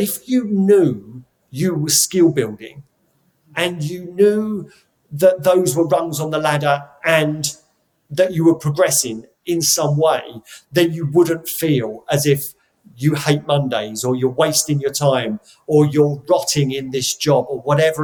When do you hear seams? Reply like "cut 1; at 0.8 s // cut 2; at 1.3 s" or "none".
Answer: none